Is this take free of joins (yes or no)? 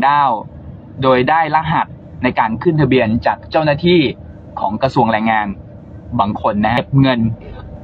no